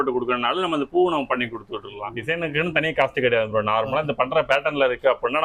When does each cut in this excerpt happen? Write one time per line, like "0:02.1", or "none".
0:02.1

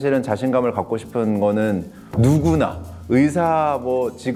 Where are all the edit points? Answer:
none

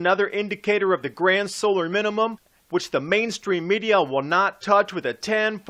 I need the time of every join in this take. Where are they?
0:04.5

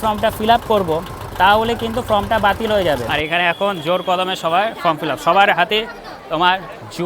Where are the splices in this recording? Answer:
0:03.1

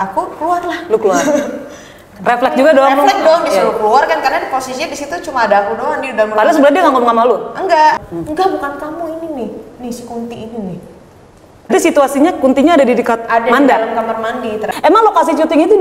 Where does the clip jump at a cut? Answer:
0:08.0
0:11.7
0:14.6

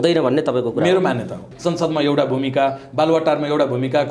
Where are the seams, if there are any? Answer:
0:01.5

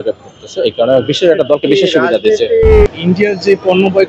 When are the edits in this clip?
0:02.9

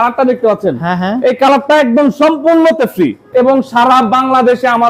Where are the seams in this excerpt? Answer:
0:03.2

